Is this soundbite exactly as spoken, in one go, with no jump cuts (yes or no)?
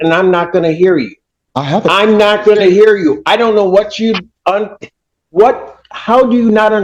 yes